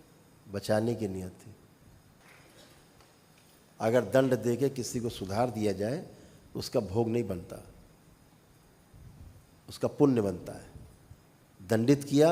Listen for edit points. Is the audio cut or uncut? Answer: cut